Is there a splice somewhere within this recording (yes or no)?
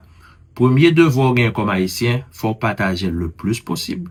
no